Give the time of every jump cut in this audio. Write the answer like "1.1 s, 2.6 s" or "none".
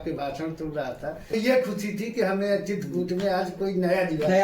1.3 s